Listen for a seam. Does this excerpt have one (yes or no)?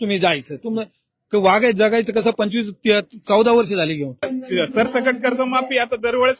yes